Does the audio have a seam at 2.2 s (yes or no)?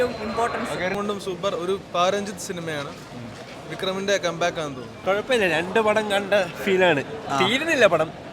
no